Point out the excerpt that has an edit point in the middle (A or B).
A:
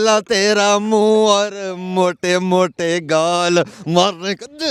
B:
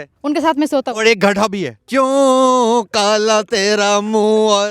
B